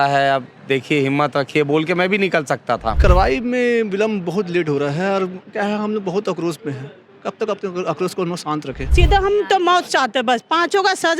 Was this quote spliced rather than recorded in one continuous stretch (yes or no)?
yes